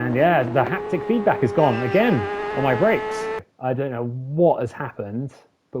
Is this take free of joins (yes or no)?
no